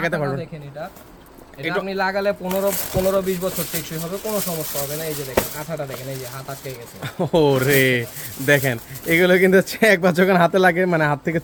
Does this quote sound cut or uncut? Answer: uncut